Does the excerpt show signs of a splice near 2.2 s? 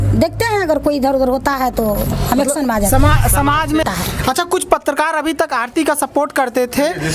no; 1 cut; at 3.8 s

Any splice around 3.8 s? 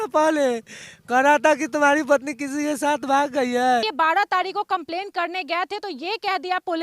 yes; 1 cut; at 3.8 s

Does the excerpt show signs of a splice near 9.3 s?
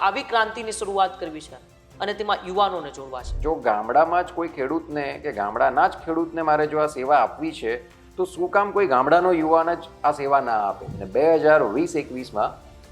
no; 2 cuts; at 3.3 s, 11.0 s

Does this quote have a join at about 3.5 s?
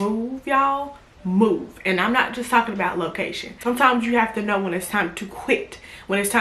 yes; 1 cut; at 3.5 s

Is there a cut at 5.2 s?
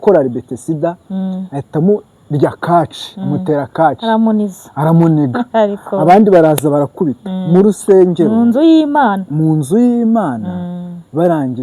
no; 0 cuts

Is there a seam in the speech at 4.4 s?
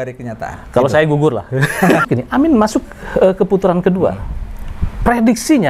no; 1 cut; at 2.0 s

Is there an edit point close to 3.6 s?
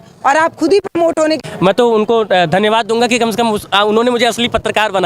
no; 1 cut; at 1.4 s

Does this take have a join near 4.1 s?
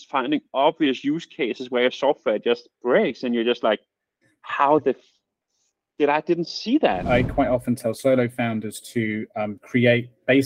no; 1 cut; at 7.0 s

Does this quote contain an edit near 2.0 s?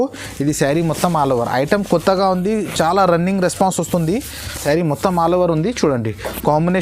no; 1 cut; at 4.6 s

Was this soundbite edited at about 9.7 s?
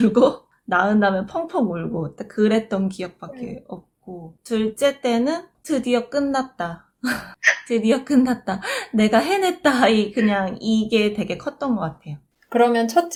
no; 0 cuts

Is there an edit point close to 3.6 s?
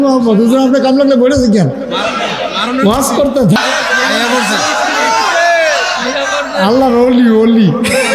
yes; 1 cut; at 3.6 s

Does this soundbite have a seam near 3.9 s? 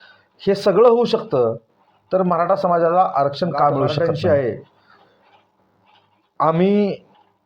yes; 1 cut; at 3.9 s

